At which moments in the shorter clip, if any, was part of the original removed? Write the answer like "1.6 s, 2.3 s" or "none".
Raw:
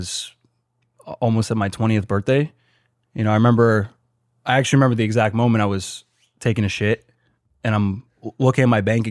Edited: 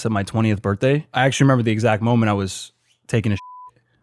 1.1 s